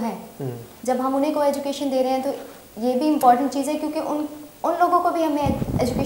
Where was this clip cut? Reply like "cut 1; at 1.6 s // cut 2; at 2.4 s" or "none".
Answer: none

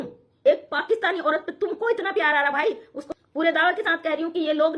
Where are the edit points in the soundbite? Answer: cut 1; at 3.0 s

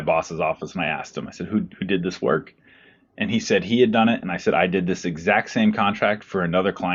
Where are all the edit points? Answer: none

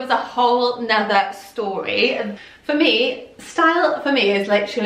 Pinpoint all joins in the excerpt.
cut 1; at 2.3 s

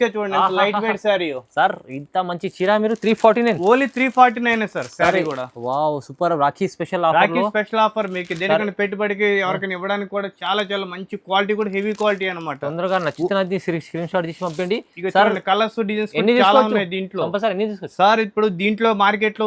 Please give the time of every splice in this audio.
none

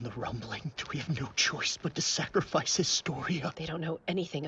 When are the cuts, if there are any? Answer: cut 1; at 0.8 s // cut 2; at 3.6 s

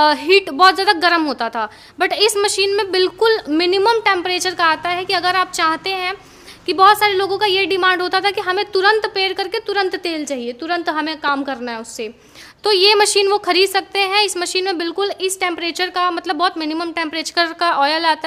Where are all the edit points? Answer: none

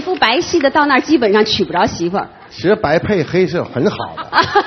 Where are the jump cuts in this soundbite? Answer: cut 1; at 2.4 s

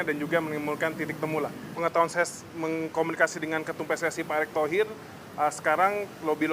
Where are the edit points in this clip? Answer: cut 1; at 1.6 s

